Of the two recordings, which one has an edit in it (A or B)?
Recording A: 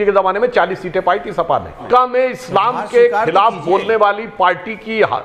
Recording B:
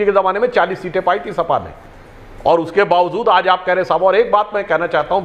A